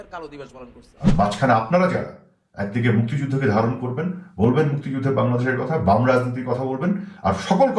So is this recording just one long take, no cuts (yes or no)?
no